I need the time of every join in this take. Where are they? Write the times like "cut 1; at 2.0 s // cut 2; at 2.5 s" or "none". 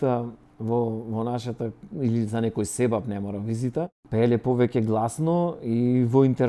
cut 1; at 4.0 s